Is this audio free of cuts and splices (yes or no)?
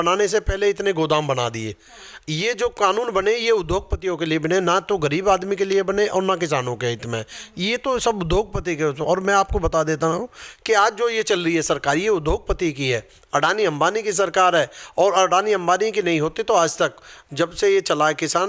yes